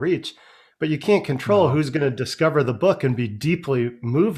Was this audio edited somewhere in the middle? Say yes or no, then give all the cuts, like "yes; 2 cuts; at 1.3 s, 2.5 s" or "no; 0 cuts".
no; 0 cuts